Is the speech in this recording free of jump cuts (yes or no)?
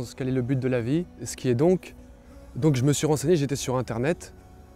no